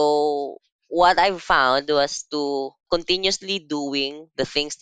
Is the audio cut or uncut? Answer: cut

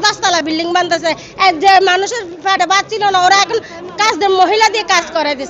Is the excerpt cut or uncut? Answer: uncut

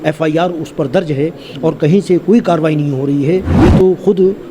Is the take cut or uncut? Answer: cut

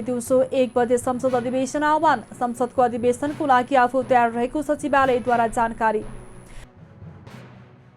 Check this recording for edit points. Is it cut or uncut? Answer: cut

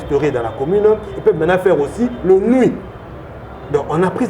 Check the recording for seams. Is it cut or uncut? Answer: uncut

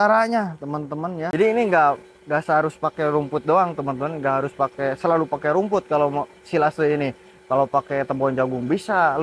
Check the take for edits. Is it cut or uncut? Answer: cut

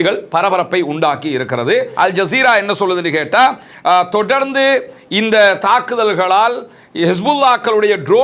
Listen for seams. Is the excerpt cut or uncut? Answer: cut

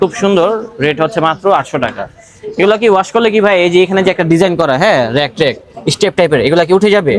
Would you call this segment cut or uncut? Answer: uncut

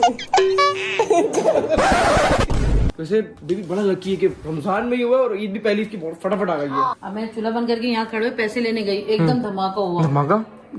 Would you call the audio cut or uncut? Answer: cut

